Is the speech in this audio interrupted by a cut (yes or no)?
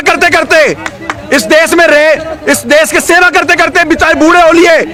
no